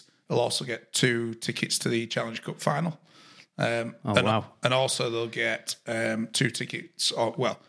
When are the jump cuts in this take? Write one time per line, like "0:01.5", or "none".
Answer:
none